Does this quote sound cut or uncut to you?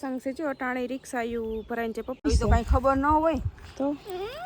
cut